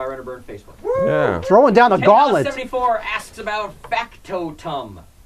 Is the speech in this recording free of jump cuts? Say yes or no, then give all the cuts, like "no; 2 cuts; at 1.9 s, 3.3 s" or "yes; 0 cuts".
no; 1 cut; at 1.4 s